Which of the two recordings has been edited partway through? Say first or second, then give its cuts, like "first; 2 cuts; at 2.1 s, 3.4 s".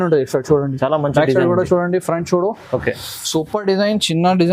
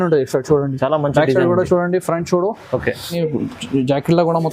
second; 1 cut; at 3.1 s